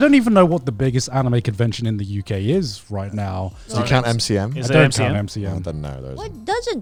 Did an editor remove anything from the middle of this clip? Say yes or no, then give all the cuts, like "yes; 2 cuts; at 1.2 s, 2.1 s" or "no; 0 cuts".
no; 0 cuts